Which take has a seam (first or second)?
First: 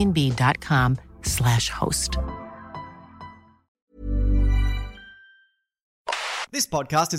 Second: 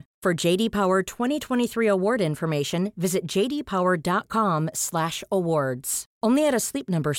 first